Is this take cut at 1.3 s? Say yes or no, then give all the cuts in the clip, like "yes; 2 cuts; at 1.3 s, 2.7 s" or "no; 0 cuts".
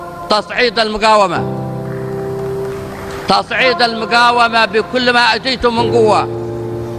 no; 0 cuts